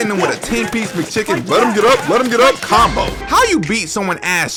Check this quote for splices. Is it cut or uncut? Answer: uncut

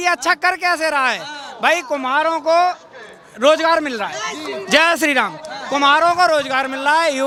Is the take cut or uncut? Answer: uncut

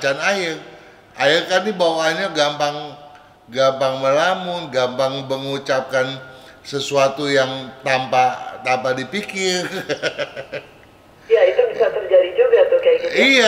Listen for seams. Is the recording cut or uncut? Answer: uncut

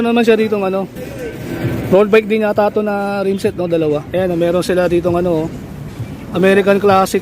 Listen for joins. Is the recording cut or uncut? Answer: cut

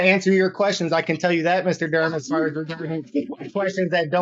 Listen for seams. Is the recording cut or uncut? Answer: uncut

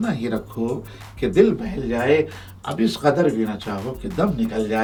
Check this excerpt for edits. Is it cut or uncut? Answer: uncut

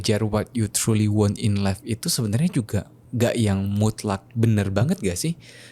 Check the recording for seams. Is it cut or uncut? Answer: uncut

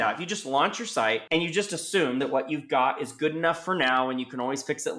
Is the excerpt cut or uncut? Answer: cut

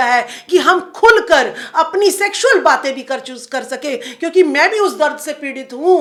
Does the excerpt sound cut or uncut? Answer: uncut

